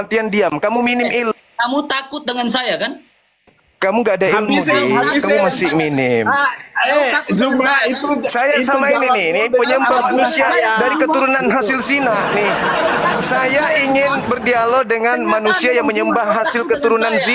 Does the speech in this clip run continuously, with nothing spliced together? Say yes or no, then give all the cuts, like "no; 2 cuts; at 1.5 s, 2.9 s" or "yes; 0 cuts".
yes; 0 cuts